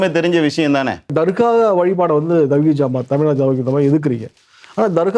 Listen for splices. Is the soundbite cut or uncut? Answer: cut